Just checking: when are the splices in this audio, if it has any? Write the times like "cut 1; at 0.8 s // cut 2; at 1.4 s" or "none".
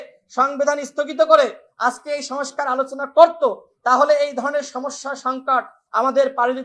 none